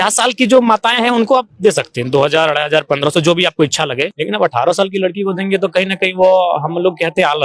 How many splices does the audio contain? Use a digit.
1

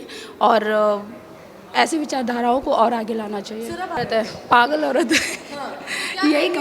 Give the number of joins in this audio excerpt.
1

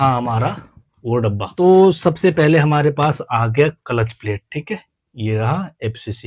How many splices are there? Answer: 1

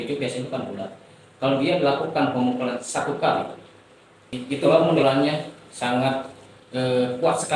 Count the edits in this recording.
1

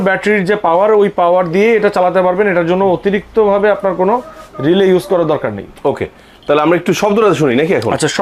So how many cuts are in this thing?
0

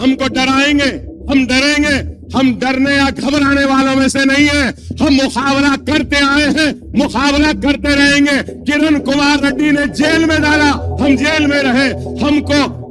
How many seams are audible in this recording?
1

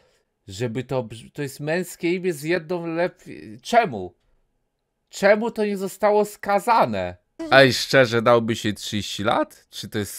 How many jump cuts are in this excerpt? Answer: 1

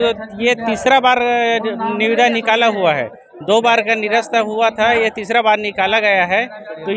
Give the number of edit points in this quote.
0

